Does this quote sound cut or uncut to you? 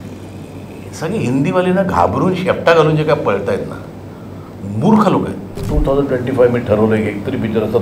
cut